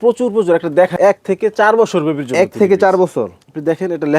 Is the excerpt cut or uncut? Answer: cut